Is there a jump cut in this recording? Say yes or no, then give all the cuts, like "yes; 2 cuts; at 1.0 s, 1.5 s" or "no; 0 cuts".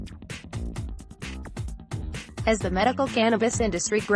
yes; 1 cut; at 2.4 s